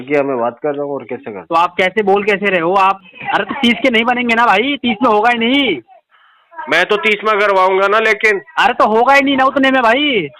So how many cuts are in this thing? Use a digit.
1